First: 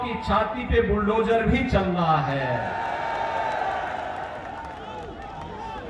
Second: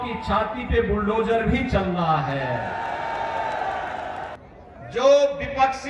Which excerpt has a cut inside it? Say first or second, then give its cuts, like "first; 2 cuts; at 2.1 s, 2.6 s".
second; 1 cut; at 4.4 s